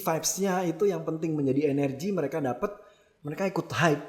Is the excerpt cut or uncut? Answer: uncut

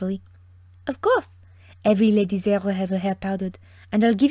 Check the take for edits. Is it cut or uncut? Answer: cut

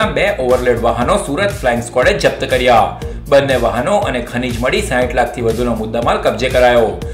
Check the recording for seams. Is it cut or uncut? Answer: uncut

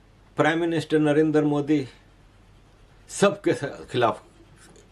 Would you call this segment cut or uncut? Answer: uncut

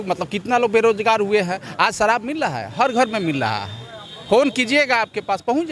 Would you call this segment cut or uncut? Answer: uncut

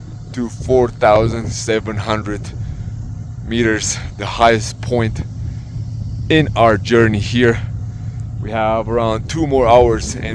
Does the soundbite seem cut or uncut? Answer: uncut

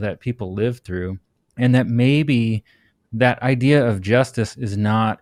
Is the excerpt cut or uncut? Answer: uncut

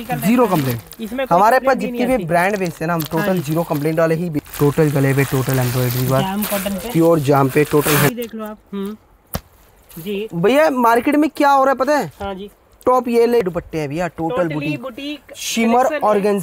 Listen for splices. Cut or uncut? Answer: cut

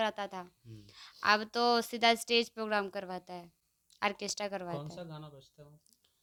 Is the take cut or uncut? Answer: uncut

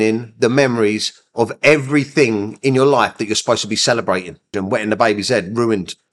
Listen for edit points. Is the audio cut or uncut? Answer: cut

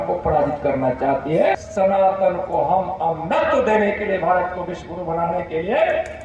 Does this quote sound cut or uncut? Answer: cut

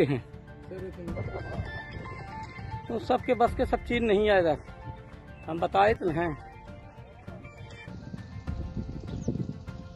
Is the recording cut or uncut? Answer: uncut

